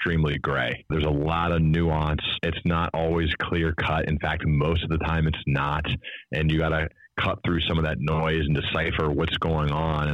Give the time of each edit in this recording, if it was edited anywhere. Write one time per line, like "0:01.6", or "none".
0:00.9
0:02.4
0:06.9